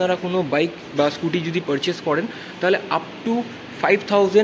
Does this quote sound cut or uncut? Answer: uncut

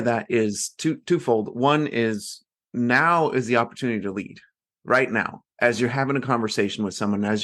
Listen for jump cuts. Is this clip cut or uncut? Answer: uncut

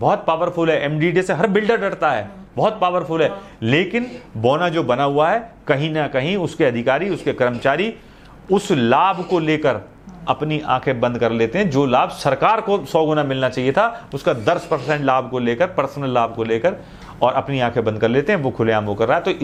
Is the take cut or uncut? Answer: uncut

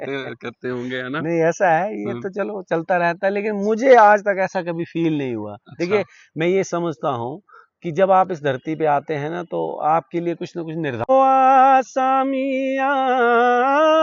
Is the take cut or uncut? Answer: cut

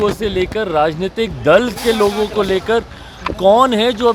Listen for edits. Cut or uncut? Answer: uncut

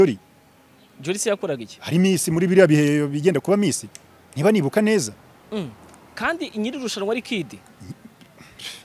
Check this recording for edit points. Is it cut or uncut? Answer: uncut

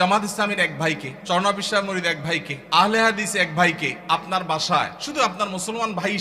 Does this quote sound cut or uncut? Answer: cut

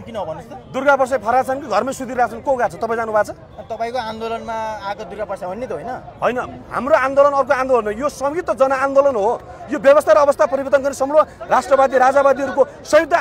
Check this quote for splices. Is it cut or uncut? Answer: uncut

